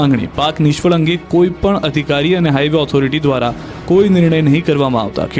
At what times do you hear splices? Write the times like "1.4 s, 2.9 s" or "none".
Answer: 3.2 s

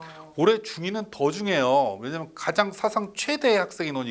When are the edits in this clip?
none

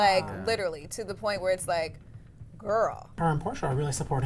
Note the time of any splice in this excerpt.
3.2 s

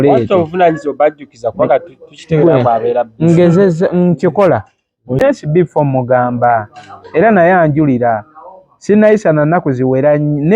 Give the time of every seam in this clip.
5.2 s

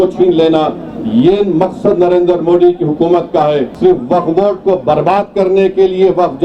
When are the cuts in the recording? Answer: 3.7 s

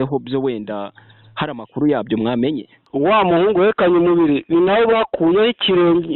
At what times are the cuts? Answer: 2.7 s

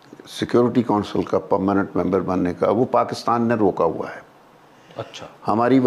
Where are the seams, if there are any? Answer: none

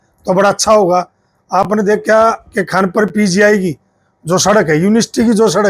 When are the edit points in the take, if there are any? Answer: none

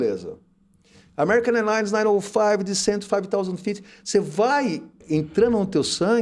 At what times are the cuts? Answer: 5.0 s

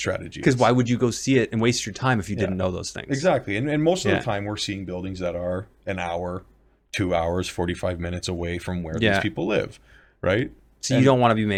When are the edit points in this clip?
none

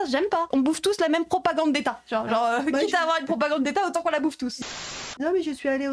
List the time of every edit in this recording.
4.9 s

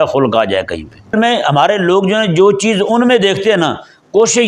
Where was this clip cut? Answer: 1.1 s

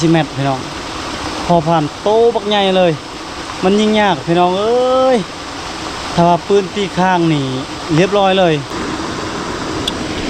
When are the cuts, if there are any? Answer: 8.8 s

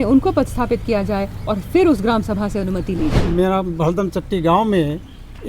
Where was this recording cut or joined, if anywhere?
3.2 s

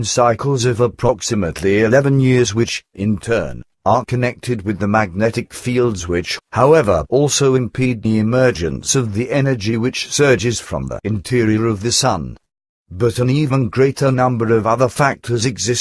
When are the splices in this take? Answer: 13.7 s

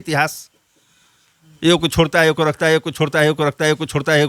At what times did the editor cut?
none

